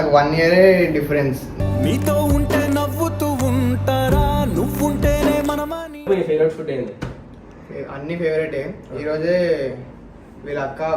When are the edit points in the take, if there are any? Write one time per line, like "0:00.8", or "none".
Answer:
0:06.1